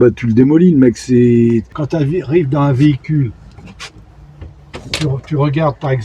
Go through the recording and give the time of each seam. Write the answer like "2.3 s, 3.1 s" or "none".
1.8 s